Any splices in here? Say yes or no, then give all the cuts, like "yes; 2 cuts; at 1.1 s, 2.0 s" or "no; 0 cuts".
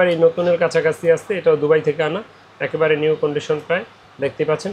no; 0 cuts